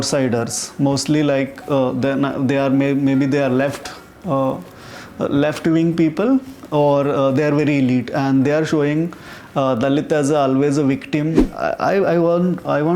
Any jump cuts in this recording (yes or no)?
yes